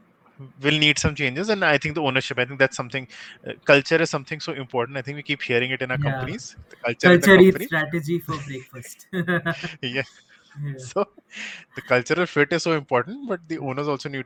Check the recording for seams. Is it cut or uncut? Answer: uncut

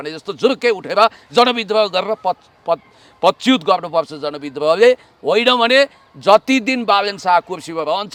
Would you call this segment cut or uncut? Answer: uncut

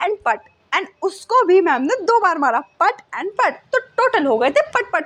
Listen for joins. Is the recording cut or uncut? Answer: uncut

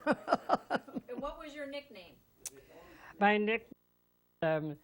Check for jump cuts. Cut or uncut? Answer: cut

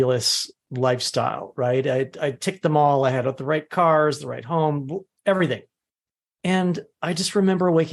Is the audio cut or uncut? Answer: uncut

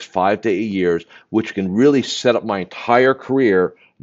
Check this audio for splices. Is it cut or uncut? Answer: uncut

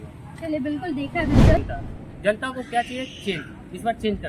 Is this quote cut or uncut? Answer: cut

